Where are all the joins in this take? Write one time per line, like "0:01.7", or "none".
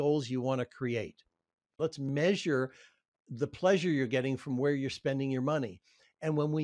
0:02.0